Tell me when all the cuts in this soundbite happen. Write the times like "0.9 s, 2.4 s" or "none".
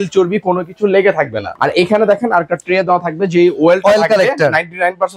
1.4 s